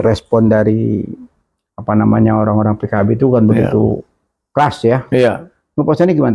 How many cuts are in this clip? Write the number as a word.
zero